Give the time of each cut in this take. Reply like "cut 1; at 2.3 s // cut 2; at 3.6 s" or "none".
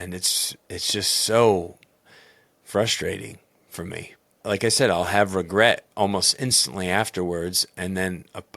cut 1; at 4.4 s